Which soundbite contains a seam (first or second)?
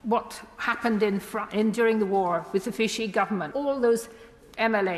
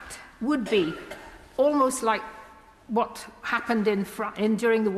first